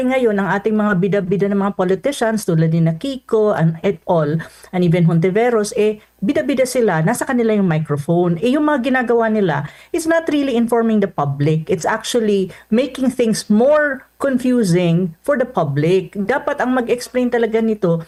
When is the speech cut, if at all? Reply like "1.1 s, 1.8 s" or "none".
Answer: none